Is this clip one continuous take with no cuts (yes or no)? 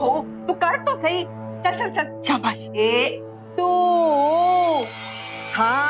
no